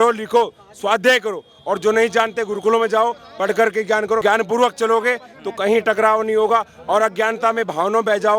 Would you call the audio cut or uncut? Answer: cut